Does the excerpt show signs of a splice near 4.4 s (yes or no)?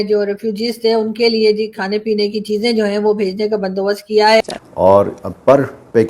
yes